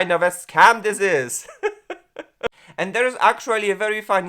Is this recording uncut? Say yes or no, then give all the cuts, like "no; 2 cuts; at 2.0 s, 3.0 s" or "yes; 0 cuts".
no; 1 cut; at 2.6 s